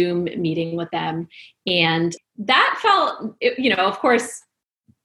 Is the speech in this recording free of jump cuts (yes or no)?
no